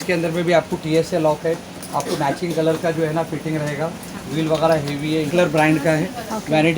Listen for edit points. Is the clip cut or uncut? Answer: cut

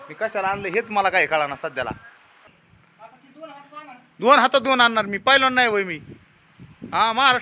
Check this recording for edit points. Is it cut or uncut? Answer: cut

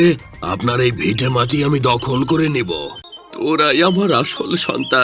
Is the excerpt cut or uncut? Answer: cut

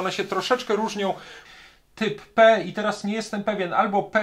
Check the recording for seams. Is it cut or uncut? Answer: cut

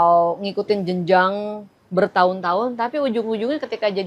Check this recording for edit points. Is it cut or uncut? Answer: uncut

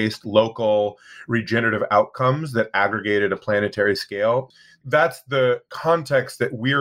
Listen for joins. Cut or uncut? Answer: cut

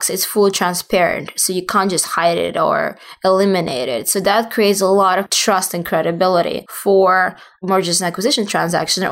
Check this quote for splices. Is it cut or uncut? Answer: cut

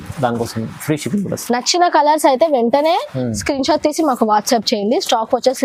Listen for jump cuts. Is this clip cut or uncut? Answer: uncut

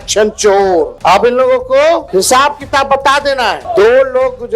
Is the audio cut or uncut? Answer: cut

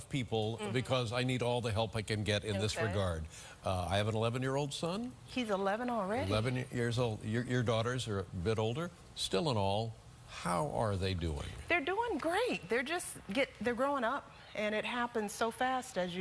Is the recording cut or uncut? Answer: cut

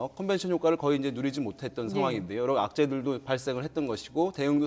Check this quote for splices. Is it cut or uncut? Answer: uncut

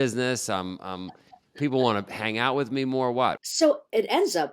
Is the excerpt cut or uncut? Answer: cut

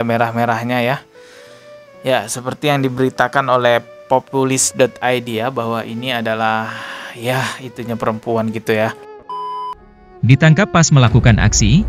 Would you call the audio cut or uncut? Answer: cut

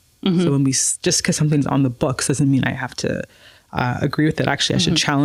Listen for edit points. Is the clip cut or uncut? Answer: uncut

